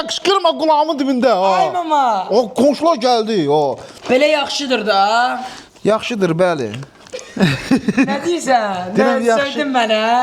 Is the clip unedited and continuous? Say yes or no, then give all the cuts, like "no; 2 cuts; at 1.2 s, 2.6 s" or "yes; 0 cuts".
no; 1 cut; at 3.9 s